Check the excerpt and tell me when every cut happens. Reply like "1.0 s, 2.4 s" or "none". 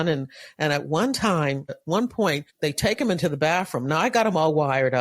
1.8 s, 2.5 s